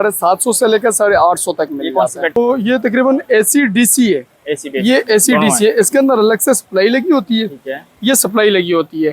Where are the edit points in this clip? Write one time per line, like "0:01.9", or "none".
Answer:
0:02.3